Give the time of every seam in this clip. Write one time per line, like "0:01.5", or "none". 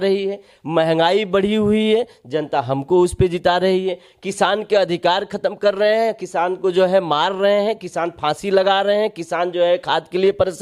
none